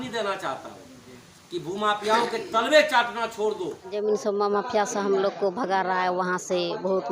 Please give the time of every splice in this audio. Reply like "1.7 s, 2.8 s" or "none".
3.9 s